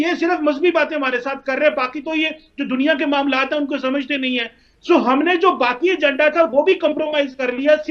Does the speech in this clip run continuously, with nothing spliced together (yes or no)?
yes